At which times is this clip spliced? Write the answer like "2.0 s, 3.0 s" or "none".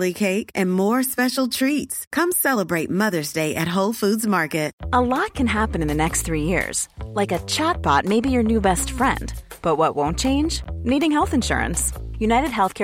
4.8 s